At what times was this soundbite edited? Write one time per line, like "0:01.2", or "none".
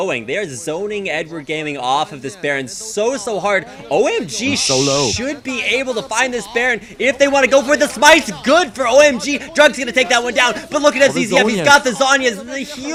none